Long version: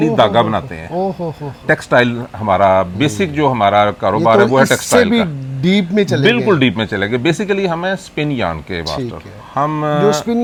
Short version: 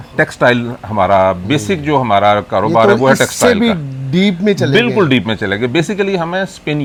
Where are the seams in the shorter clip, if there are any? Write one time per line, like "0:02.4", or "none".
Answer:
none